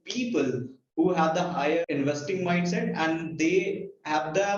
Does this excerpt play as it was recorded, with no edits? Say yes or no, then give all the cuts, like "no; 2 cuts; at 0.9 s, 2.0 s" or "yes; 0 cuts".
no; 1 cut; at 1.8 s